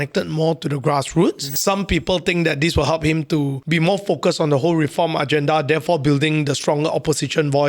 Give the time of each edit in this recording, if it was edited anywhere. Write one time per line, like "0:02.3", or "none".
0:01.6
0:03.6